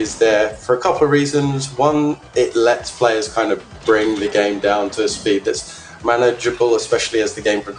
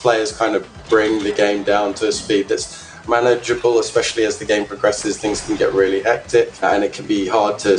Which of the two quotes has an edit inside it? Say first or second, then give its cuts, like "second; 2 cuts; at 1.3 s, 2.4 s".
second; 1 cut; at 6.6 s